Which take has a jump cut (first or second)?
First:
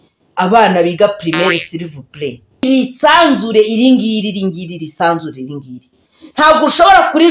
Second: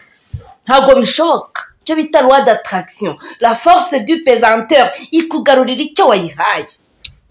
first